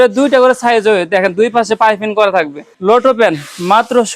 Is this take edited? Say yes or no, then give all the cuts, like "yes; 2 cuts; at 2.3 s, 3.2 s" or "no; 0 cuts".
yes; 1 cut; at 2.7 s